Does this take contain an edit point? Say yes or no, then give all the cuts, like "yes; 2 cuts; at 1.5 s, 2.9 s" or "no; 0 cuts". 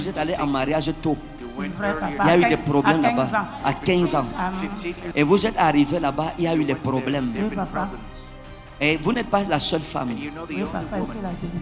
yes; 1 cut; at 5.0 s